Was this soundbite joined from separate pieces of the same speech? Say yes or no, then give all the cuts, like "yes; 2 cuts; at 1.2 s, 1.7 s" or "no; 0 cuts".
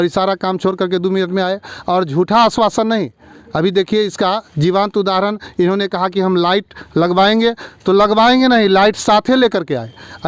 no; 0 cuts